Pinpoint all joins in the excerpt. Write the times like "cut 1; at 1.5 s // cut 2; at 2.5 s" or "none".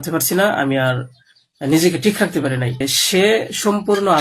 cut 1; at 2.9 s